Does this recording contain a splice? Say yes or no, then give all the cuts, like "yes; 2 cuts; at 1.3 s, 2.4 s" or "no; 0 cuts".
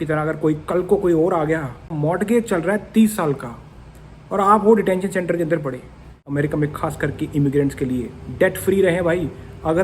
yes; 2 cuts; at 1.9 s, 6.2 s